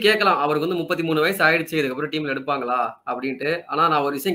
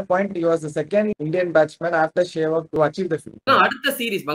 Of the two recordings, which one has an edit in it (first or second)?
second